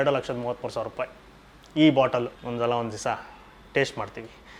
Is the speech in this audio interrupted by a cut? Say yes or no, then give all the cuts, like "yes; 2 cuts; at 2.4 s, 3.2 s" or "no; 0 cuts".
yes; 1 cut; at 2.4 s